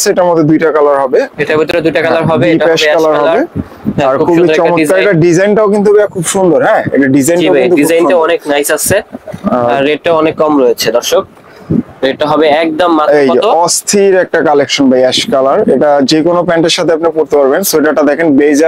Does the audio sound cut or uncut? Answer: uncut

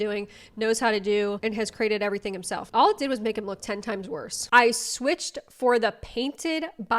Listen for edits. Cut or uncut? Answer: cut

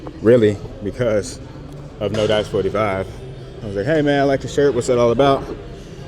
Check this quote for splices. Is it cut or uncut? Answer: cut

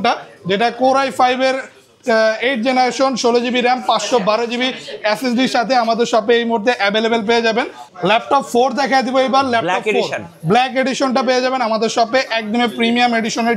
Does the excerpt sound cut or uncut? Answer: cut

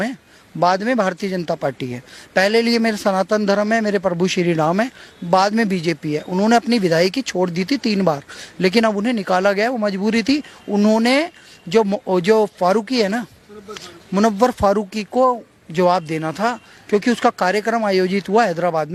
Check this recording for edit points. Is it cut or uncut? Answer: uncut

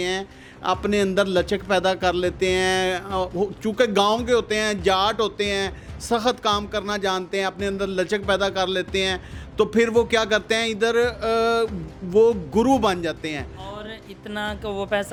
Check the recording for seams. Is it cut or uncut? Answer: uncut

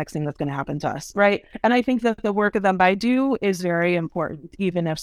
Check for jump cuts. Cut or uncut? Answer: cut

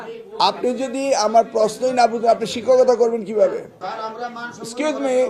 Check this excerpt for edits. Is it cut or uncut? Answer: cut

